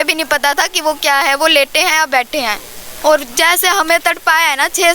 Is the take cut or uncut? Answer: cut